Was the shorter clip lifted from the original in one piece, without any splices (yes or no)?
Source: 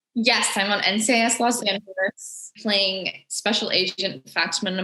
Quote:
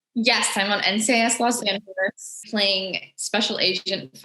no